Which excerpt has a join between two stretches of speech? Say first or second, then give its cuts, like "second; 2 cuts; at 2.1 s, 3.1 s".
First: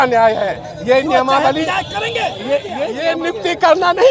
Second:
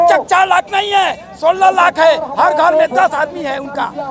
first; 1 cut; at 2.9 s